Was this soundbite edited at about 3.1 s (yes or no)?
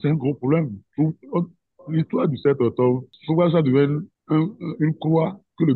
yes